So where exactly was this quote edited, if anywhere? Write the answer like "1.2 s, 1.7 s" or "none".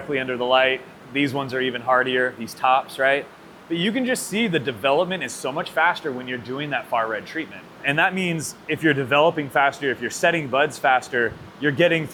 none